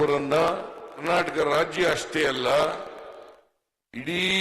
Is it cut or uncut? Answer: cut